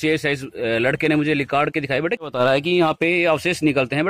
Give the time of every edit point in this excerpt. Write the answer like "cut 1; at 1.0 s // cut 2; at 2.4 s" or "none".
cut 1; at 2.3 s